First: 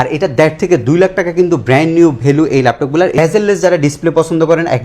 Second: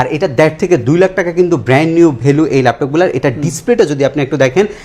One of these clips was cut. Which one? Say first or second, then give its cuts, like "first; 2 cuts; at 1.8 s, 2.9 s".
first; 1 cut; at 3.2 s